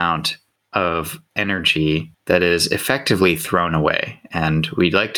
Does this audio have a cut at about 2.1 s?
yes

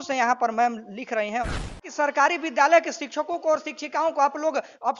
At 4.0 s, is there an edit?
no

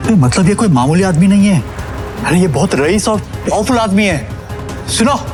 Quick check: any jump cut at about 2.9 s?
no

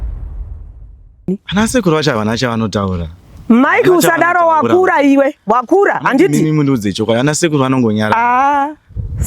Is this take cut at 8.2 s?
no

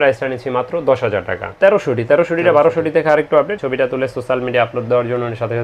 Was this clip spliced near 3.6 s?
yes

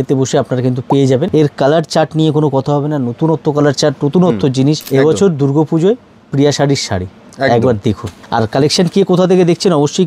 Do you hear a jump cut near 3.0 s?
no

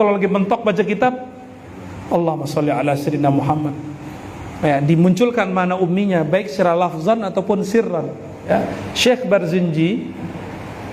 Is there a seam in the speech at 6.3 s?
no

